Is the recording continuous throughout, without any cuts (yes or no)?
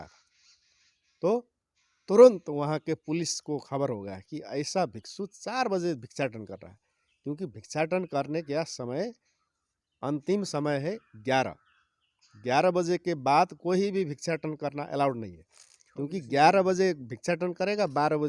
yes